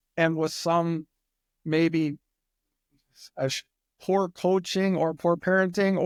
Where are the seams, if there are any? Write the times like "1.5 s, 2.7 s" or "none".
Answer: none

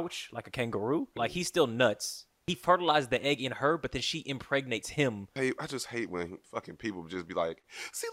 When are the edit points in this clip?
1.2 s, 2.5 s, 5.3 s, 6.4 s

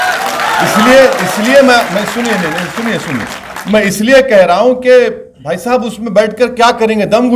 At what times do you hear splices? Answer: none

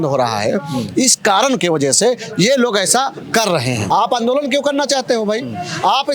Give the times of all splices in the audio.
3.8 s

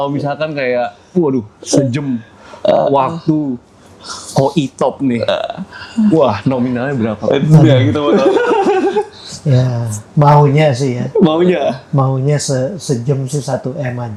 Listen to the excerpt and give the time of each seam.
none

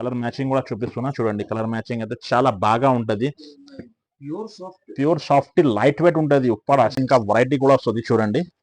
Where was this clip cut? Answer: 7.0 s

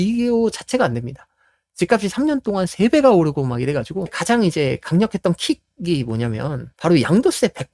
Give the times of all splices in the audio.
4.2 s, 6.7 s

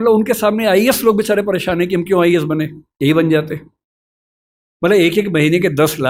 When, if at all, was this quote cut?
none

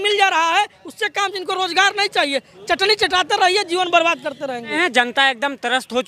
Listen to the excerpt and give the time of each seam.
4.7 s

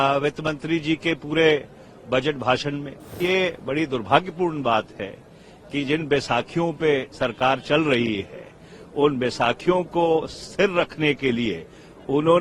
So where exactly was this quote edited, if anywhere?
3.2 s

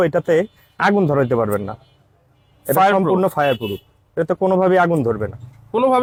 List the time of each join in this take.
none

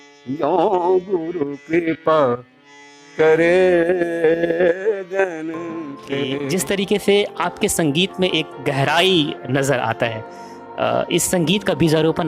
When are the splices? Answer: 6.3 s

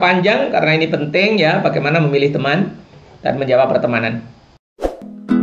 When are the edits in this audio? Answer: 4.5 s

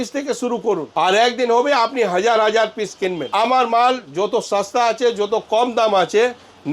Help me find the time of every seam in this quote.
0.9 s, 3.2 s

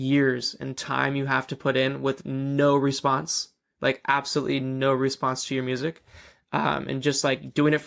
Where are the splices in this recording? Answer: none

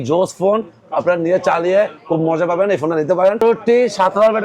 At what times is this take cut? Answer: 3.4 s

